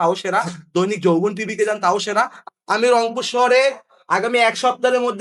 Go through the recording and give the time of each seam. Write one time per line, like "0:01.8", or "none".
0:02.4